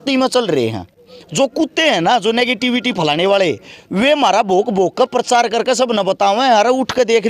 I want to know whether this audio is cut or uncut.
uncut